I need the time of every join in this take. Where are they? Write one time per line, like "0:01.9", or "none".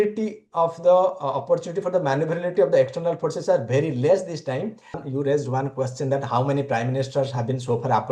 0:05.0